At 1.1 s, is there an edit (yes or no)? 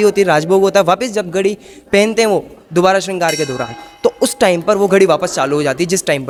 no